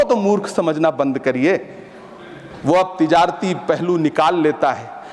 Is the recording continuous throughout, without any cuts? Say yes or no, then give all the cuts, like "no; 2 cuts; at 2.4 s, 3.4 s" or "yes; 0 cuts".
yes; 0 cuts